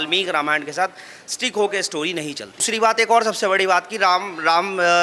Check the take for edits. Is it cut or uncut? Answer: cut